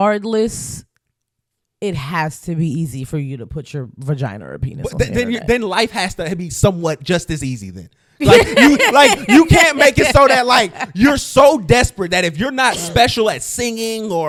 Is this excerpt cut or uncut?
uncut